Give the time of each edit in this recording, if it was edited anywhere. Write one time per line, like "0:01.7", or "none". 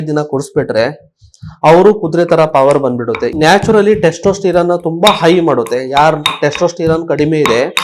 0:03.3